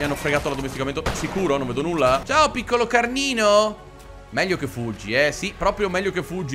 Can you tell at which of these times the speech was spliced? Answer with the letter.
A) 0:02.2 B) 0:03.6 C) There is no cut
A